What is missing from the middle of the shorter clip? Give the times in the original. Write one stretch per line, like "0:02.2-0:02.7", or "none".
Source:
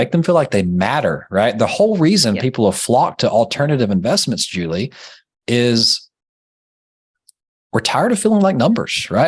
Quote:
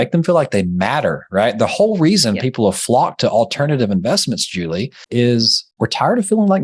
0:05.0-0:05.3
0:06.0-0:07.6